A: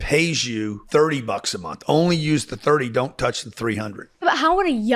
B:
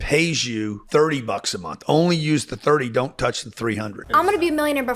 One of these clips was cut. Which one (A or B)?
B